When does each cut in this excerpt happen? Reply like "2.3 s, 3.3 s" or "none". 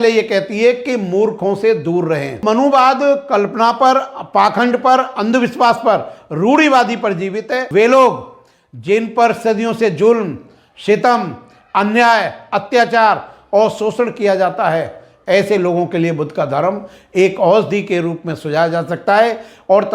2.4 s, 7.6 s